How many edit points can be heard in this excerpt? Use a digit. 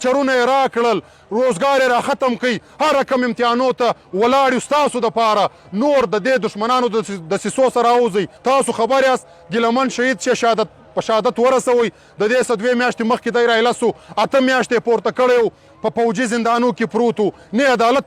1